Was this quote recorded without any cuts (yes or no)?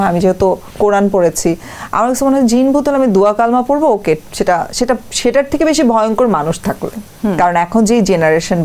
yes